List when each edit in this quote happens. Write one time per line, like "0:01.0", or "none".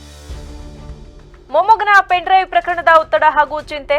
0:01.3